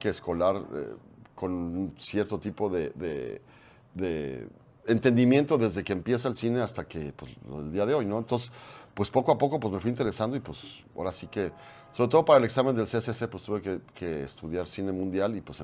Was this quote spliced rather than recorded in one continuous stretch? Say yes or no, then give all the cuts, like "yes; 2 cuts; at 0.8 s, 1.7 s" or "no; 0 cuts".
no; 0 cuts